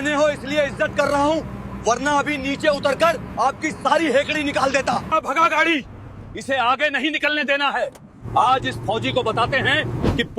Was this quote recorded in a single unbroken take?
no; 1 cut; at 5.1 s

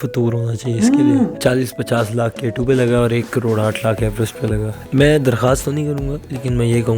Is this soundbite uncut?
no; 2 cuts; at 1.4 s, 4.7 s

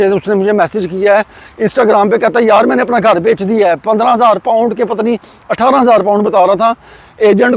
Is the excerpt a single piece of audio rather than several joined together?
yes; 0 cuts

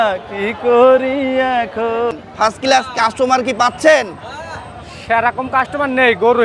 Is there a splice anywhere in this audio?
yes; 1 cut; at 2.1 s

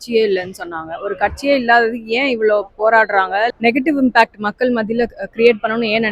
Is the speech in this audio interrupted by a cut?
yes; 1 cut; at 3.5 s

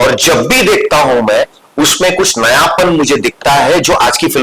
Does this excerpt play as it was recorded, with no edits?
yes; 0 cuts

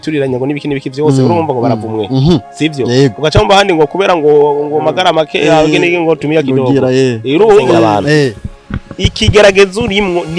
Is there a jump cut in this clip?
yes; 1 cut; at 7.8 s

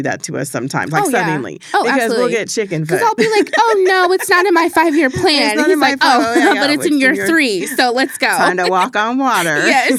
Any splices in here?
no; 0 cuts

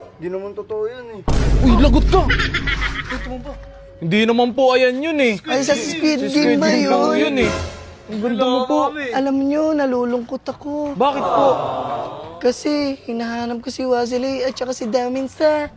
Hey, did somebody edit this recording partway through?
no; 0 cuts

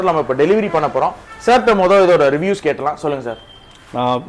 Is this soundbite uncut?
yes; 0 cuts

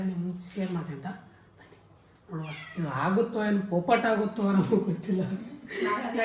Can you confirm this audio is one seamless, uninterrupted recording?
yes; 0 cuts

